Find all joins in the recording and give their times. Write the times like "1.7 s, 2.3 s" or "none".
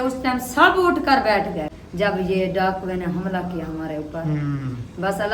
1.8 s